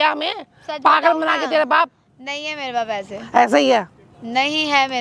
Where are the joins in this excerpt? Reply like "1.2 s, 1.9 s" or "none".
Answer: none